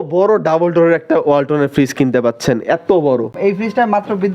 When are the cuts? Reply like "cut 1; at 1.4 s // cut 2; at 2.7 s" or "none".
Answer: cut 1; at 3.4 s